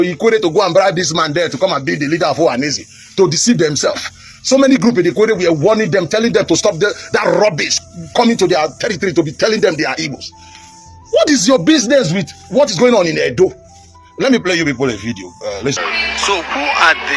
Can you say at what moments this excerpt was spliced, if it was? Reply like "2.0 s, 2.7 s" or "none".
15.8 s